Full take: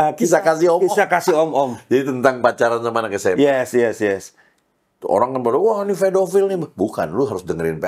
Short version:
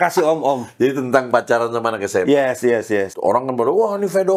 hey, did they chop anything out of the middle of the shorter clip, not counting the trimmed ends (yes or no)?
yes